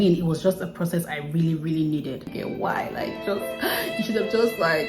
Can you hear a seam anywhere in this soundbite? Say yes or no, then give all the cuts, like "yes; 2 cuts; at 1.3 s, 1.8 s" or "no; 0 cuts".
yes; 1 cut; at 2.3 s